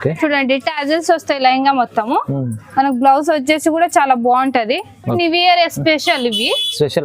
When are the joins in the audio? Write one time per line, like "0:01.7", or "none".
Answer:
0:05.2